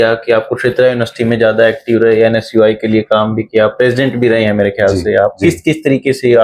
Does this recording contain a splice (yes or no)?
no